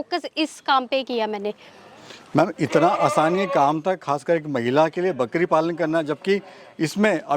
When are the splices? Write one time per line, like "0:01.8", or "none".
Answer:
none